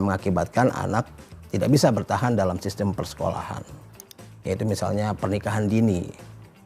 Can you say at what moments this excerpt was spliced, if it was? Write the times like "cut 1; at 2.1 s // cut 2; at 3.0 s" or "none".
none

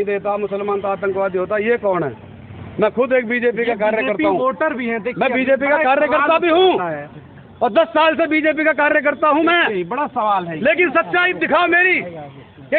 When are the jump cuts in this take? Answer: none

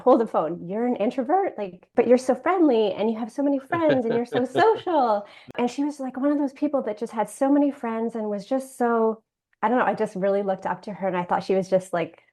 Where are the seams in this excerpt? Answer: cut 1; at 1.9 s // cut 2; at 5.5 s

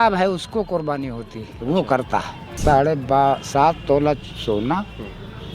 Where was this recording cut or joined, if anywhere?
cut 1; at 2.4 s

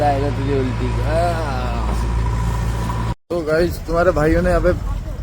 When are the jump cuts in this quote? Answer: cut 1; at 3.1 s

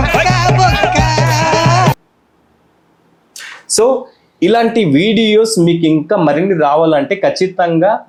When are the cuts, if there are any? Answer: none

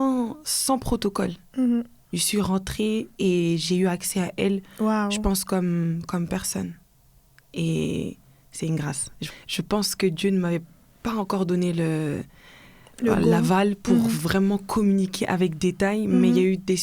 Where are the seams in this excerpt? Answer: cut 1; at 9.1 s

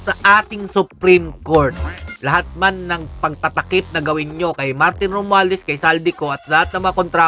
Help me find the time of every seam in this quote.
cut 1; at 2.1 s

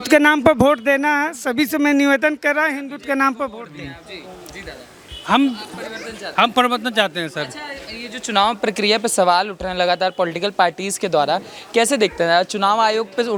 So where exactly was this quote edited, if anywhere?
none

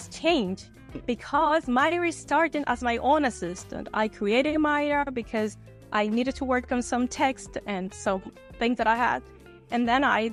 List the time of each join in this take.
none

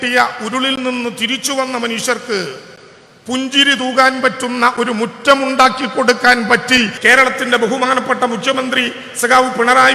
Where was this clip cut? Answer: cut 1; at 7.0 s

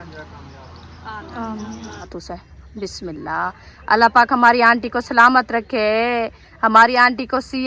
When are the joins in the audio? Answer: cut 1; at 2.1 s // cut 2; at 6.4 s

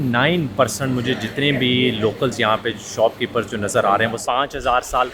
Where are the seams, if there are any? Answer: cut 1; at 4.2 s

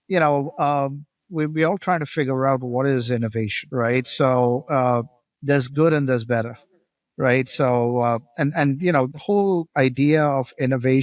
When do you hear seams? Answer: cut 1; at 3.6 s // cut 2; at 9.2 s

